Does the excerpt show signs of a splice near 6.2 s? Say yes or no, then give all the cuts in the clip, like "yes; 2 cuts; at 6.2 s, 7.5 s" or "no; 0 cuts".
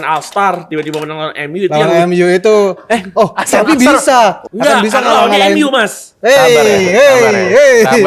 no; 1 cut; at 4.4 s